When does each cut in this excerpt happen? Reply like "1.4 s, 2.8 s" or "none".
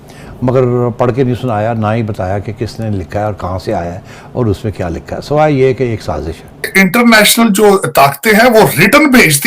6.7 s